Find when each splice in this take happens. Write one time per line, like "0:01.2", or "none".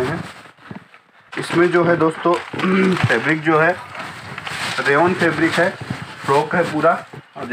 0:01.2